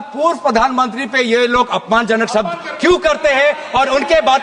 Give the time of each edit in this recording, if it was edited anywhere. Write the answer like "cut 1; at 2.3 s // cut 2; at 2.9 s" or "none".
none